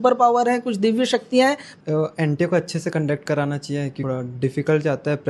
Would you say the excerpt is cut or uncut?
cut